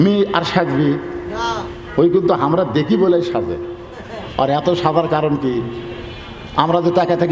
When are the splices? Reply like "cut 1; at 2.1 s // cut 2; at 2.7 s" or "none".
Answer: none